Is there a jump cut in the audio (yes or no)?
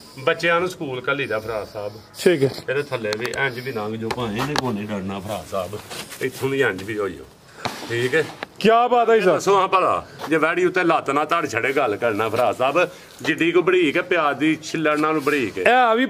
no